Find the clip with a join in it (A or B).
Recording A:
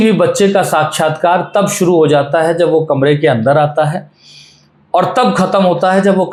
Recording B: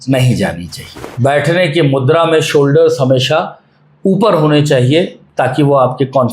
B